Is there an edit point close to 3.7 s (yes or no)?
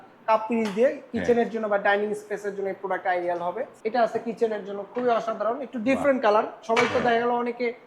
yes